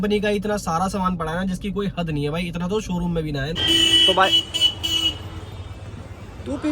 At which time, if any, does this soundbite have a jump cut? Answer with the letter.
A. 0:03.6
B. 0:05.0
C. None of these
A